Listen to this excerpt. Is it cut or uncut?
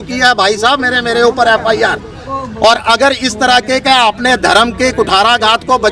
uncut